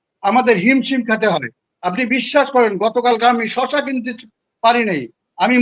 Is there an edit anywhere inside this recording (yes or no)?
no